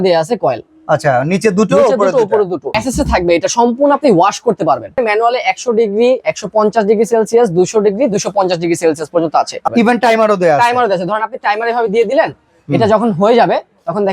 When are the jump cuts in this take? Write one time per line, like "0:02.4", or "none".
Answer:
0:02.7
0:04.9
0:09.6